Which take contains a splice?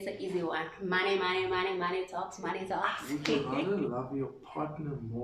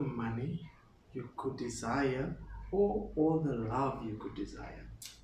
first; 1 cut; at 3.1 s

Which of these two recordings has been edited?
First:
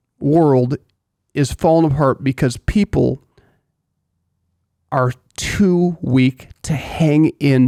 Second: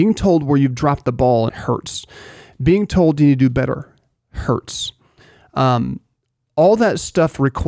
second; 1 cut; at 1.5 s

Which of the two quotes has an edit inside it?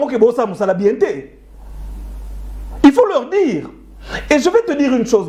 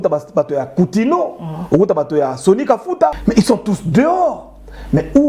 second; 1 cut; at 3.2 s

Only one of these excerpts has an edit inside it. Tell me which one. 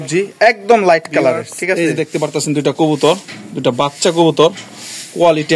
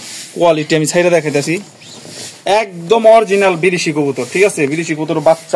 first; 1 cut; at 1.8 s

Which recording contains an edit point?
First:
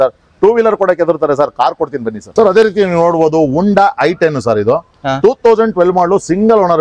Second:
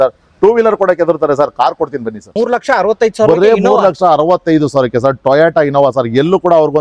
second; 1 cut; at 2.2 s

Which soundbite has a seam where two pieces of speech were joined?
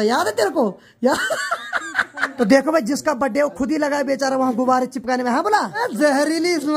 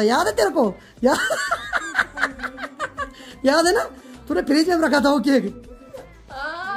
first; 2 cuts; at 2.3 s, 5.7 s

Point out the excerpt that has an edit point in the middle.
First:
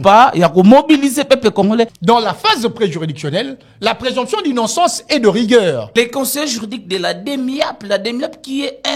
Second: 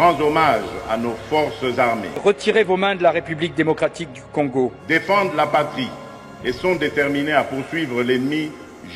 first; 2 cuts; at 1.9 s, 5.8 s

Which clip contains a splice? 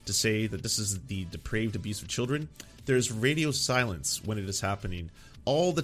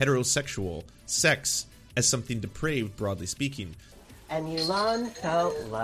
second; 1 cut; at 3.8 s

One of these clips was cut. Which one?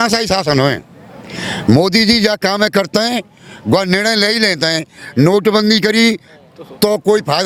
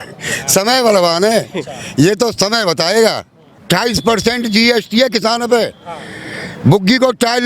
second; 1 cut; at 3.6 s

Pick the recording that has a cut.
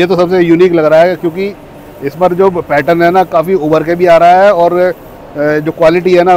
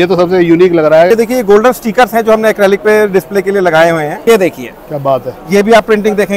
second; 2 cuts; at 1.1 s, 4.2 s

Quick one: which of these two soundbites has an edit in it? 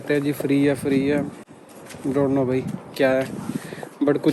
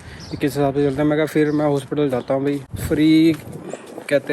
second; 1 cut; at 2.7 s

